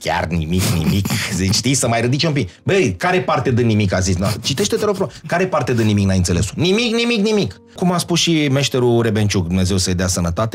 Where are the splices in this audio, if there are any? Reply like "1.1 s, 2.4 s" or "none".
7.8 s